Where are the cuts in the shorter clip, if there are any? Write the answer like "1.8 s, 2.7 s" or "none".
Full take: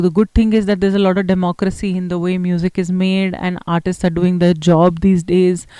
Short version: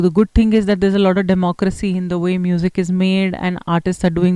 none